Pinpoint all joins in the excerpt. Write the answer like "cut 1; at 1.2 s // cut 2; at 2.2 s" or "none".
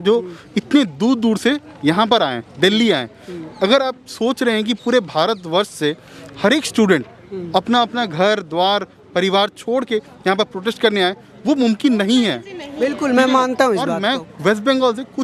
none

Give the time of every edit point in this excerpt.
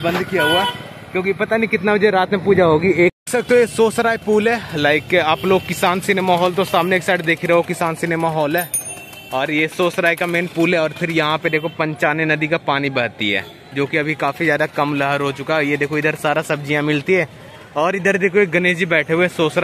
cut 1; at 3.2 s

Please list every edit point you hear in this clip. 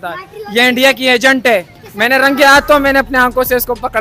cut 1; at 1.8 s

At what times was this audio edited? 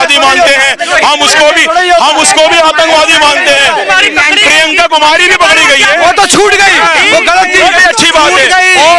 none

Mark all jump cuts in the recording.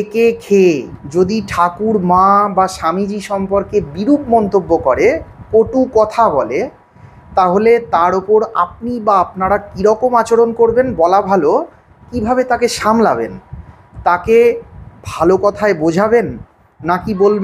cut 1; at 1.0 s

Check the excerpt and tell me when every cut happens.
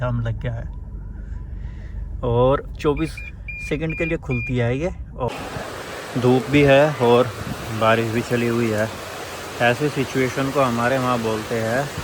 cut 1; at 5.3 s

